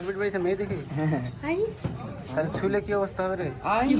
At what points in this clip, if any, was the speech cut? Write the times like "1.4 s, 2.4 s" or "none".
none

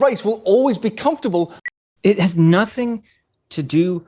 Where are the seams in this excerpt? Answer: 1.8 s

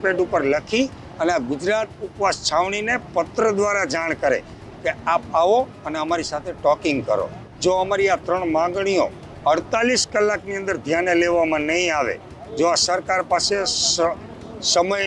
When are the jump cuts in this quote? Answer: 7.4 s, 12.4 s

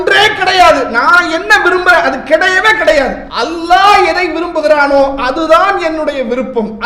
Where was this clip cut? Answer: 3.2 s

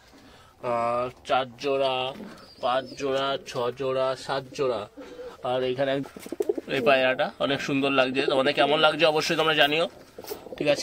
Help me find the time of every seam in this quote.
6.0 s

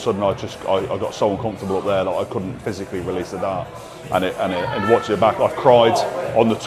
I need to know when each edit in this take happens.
none

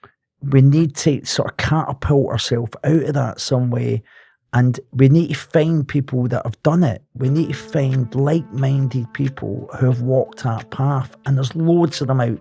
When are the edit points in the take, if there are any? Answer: none

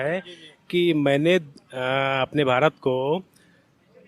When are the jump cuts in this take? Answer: none

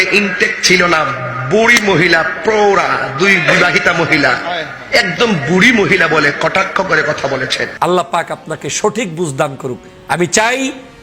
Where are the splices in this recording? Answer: 7.6 s

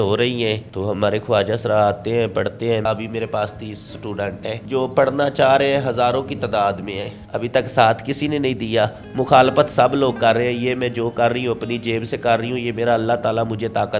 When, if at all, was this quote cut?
2.9 s, 4.5 s, 7.1 s

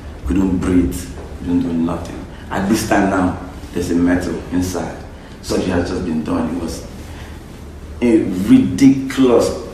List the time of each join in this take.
5.5 s

